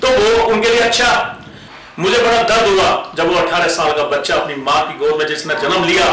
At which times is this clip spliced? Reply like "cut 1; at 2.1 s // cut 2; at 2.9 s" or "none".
cut 1; at 1.7 s